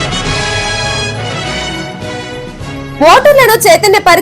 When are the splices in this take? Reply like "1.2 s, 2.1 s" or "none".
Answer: 2.9 s

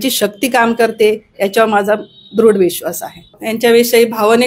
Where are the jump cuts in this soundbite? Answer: 3.4 s

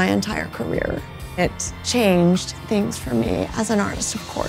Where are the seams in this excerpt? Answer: 1.5 s

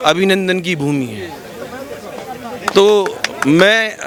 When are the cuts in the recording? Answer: none

